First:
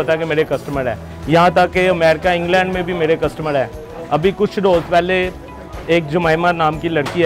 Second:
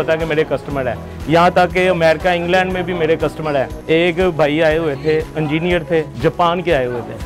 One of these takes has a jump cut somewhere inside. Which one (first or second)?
second